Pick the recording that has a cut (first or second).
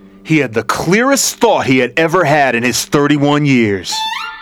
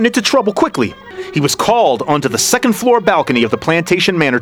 second